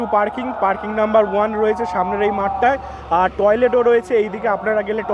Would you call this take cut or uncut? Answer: uncut